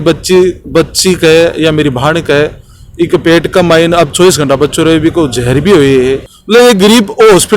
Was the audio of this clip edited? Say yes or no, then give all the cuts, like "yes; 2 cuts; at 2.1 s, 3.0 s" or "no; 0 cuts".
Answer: yes; 1 cut; at 6.3 s